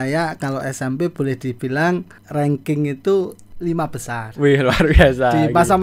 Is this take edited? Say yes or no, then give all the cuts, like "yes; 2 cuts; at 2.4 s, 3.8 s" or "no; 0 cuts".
yes; 2 cuts; at 2.2 s, 3.4 s